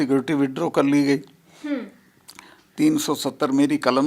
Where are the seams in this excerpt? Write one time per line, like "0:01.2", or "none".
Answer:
none